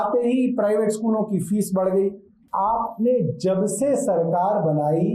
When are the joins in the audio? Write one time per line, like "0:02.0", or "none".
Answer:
0:02.3